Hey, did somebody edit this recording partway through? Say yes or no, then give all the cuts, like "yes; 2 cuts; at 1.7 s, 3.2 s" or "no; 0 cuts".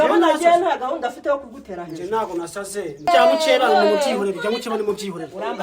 yes; 1 cut; at 3.1 s